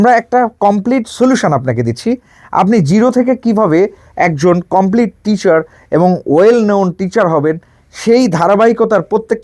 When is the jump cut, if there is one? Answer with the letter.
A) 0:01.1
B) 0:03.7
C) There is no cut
C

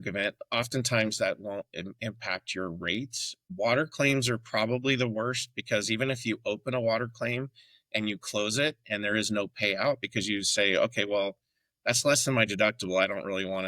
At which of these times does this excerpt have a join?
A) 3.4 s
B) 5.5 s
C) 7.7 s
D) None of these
A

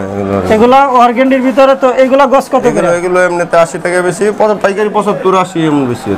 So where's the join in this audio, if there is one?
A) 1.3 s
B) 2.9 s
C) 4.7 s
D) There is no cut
D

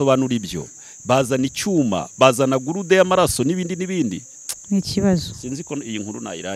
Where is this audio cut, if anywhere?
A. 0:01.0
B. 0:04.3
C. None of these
B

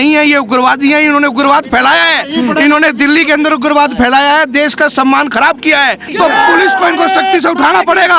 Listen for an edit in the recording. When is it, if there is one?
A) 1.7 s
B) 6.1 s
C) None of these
B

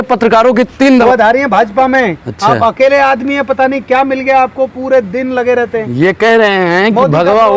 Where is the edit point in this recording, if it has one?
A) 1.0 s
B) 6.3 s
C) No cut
A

